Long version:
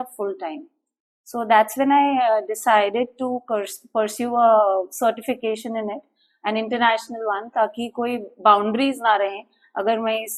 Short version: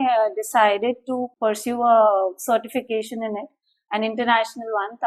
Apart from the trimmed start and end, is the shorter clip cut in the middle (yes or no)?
yes